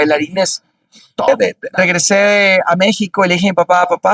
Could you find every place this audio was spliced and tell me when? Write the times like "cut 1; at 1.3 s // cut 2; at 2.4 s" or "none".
cut 1; at 1.3 s